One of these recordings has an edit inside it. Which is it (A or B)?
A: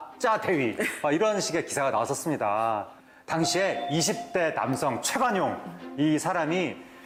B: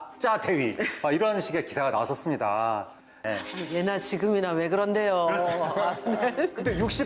B